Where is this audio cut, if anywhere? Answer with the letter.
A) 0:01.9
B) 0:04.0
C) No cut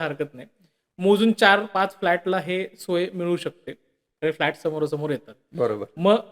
C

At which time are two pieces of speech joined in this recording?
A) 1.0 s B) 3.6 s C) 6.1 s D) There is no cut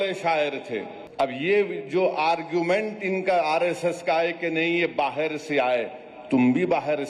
A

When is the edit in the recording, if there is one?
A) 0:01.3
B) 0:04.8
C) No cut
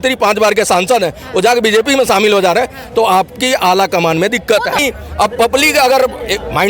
B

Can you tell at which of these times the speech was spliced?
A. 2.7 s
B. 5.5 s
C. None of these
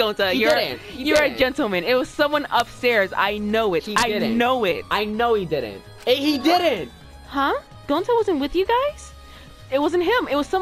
C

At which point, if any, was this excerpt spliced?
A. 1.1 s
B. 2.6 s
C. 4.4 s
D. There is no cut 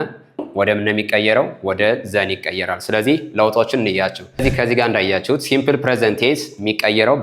C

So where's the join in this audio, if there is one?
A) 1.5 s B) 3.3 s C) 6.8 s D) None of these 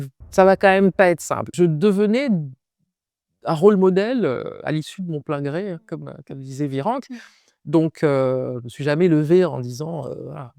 A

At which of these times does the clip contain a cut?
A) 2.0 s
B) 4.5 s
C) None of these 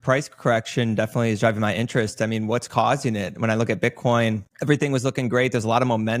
B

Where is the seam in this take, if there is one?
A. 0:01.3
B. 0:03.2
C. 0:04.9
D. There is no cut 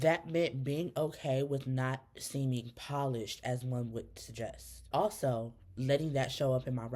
C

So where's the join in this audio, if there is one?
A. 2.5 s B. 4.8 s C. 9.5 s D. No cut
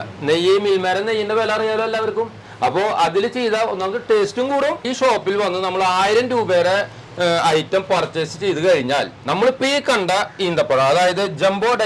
B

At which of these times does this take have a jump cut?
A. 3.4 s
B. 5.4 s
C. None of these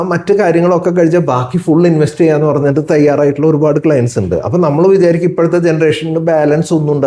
C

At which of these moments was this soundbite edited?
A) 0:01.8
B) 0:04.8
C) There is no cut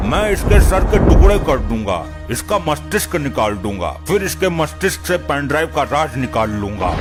C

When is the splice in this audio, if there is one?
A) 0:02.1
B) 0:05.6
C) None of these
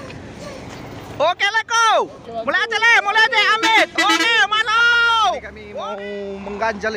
B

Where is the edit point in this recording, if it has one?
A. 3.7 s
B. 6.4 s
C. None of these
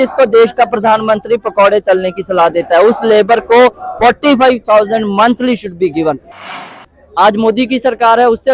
B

